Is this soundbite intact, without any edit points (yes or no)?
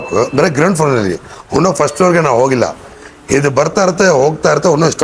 yes